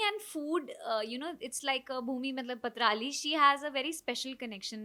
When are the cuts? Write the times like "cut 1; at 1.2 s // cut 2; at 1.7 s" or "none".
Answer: none